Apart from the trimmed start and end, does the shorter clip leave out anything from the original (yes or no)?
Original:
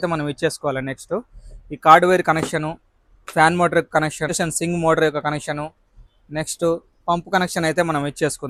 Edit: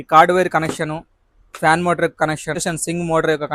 no